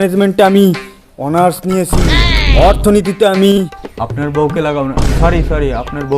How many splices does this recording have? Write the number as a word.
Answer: one